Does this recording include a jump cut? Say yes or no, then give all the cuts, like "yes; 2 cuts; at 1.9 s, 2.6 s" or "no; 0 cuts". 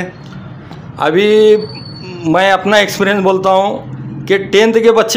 no; 0 cuts